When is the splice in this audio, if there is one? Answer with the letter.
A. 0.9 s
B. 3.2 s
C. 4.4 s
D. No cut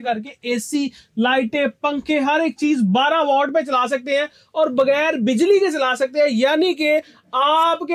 D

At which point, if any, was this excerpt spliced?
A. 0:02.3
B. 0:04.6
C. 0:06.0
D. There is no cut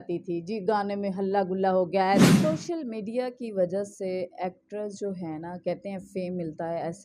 A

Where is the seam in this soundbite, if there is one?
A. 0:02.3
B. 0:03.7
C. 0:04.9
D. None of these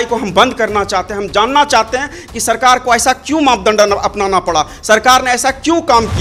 D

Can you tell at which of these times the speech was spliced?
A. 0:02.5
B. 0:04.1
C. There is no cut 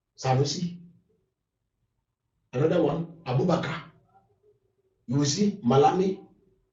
C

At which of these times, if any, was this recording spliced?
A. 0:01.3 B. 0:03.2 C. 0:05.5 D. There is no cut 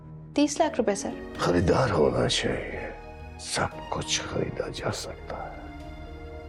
A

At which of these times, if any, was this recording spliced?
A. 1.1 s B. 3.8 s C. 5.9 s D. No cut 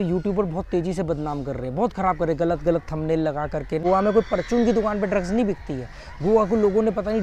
B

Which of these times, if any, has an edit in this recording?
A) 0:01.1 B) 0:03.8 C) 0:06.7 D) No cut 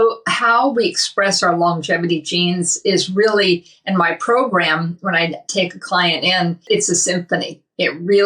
C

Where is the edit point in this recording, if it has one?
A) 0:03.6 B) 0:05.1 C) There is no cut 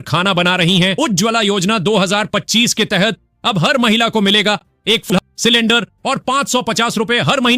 B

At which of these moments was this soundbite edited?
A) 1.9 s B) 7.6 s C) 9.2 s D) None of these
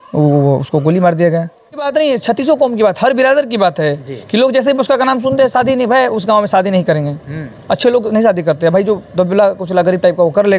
A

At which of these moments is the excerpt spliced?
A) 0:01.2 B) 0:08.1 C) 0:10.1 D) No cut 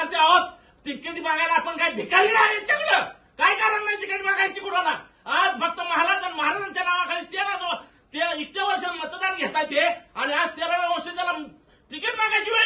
D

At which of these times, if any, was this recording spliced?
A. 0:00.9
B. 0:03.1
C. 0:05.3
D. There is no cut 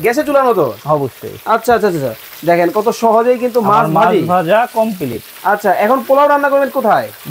D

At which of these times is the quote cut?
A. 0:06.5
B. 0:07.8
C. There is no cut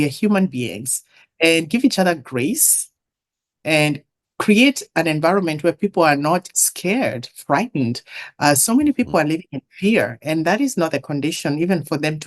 A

